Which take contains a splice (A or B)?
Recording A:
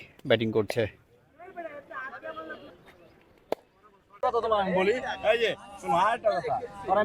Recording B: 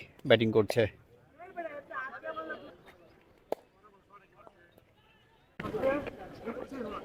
A